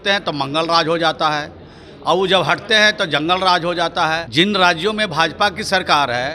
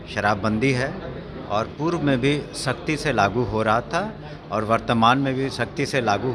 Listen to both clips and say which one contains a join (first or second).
first